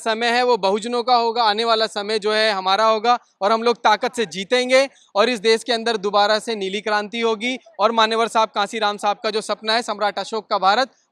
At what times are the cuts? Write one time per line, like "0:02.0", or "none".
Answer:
none